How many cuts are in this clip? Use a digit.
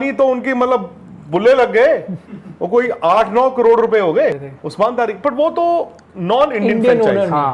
1